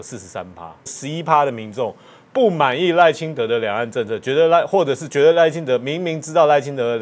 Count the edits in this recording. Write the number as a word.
one